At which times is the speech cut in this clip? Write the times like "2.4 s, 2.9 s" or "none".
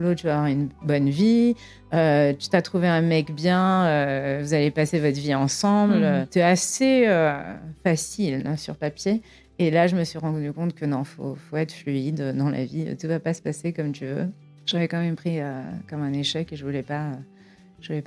6.3 s, 14.5 s